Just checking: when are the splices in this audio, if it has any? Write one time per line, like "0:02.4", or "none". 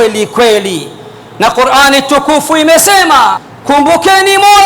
0:03.5